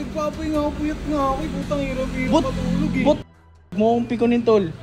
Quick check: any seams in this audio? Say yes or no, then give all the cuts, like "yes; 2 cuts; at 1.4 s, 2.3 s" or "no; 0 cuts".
yes; 1 cut; at 3.2 s